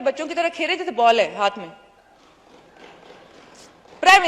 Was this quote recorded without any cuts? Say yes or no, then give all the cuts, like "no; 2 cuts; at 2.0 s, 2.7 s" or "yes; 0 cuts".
yes; 0 cuts